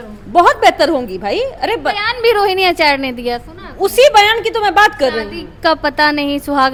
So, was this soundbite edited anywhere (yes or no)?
no